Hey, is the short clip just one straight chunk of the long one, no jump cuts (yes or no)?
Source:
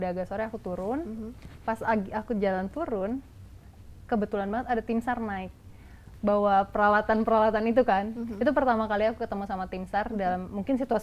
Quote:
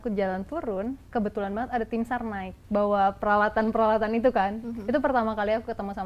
no